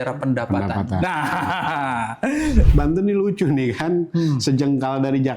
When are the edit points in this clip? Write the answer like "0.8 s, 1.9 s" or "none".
2.7 s